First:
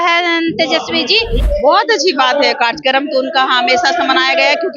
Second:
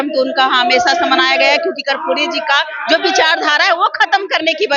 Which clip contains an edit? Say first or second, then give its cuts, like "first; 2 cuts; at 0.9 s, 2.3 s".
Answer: first; 1 cut; at 1.4 s